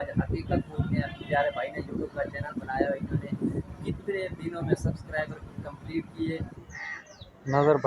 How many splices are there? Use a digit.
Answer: 1